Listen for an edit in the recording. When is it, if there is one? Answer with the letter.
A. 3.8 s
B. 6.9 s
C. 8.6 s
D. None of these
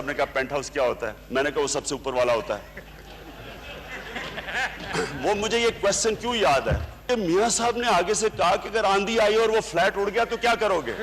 B